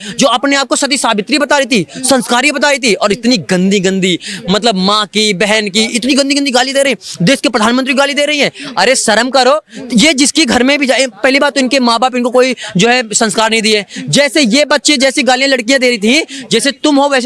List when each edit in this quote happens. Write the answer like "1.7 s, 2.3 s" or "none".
none